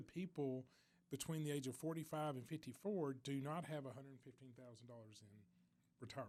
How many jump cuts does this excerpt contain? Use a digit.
0